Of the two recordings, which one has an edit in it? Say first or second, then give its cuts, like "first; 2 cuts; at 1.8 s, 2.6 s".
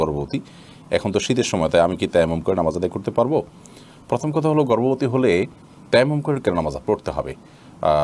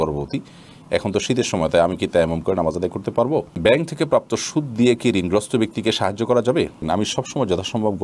second; 2 cuts; at 3.5 s, 6.9 s